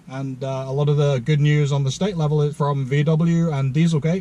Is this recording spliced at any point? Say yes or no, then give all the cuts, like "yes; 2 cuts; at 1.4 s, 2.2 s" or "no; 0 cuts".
yes; 1 cut; at 2.5 s